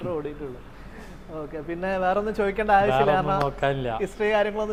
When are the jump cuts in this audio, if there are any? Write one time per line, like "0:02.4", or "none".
none